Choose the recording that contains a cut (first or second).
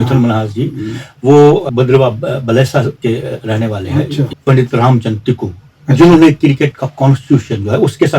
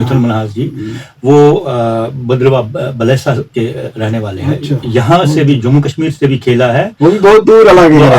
first